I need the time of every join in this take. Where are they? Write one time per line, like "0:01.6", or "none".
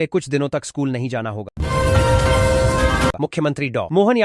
0:01.5
0:03.1